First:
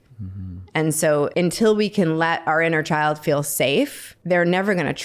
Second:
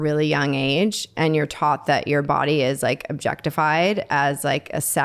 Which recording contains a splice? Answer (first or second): first